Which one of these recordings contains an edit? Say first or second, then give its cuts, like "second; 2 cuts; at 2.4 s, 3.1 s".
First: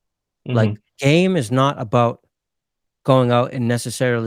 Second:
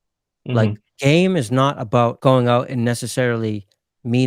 second; 1 cut; at 2.2 s